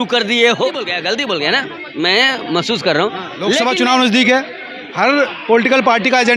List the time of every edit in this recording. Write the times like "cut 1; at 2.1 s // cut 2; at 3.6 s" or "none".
cut 1; at 0.9 s // cut 2; at 3.6 s